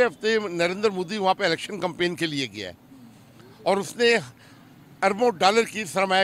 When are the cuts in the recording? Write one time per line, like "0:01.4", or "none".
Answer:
none